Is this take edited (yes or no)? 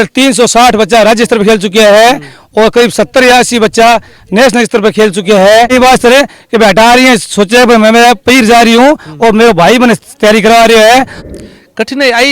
yes